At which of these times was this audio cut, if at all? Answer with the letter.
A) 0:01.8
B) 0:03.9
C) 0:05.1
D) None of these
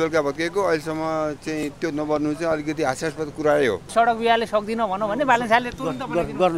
B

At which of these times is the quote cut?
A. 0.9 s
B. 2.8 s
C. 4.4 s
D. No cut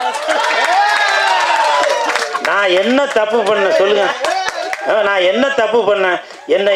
D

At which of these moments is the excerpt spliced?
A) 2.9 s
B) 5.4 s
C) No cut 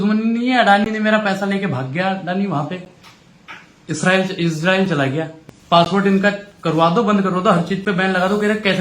B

